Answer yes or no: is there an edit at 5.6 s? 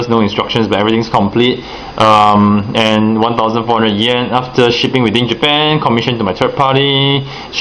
no